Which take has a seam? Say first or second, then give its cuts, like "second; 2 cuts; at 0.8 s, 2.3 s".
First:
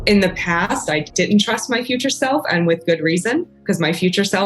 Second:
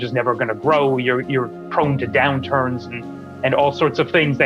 first; 2 cuts; at 1.1 s, 3.5 s